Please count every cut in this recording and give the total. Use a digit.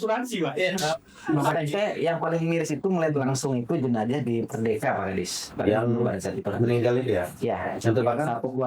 1